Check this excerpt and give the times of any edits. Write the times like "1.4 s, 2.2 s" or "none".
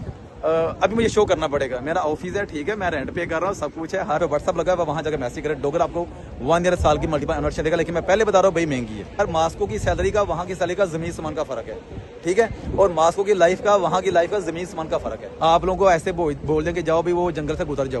4.2 s, 9.2 s, 15.3 s